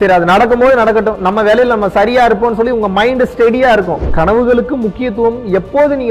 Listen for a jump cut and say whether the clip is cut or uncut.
cut